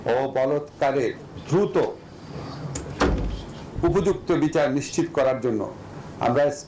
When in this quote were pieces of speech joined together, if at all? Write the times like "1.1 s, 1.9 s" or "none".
1.3 s